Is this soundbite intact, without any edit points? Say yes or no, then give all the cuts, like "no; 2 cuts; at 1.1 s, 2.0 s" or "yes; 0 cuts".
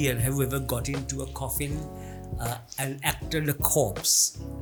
yes; 0 cuts